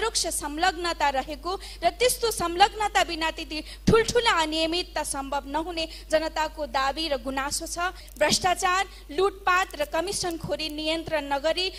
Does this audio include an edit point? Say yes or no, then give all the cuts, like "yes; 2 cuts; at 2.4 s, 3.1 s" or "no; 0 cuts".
yes; 1 cut; at 8.0 s